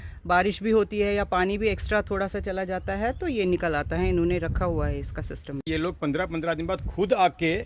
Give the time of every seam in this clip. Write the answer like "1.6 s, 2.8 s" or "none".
5.7 s